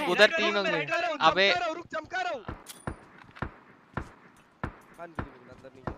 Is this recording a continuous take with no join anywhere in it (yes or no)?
no